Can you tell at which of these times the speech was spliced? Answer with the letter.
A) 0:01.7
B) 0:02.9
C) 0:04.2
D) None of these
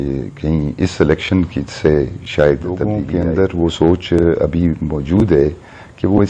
B